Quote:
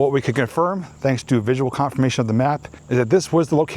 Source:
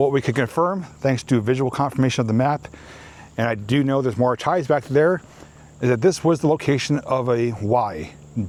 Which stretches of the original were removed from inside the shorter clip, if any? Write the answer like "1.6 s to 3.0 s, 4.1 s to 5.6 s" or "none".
2.7 s to 5.6 s